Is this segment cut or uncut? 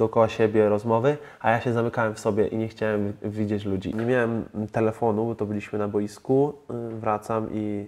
cut